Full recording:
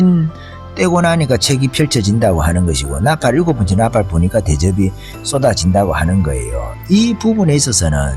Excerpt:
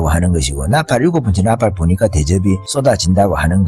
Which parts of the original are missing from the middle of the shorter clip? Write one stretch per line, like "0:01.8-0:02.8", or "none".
0:05.0-0:05.2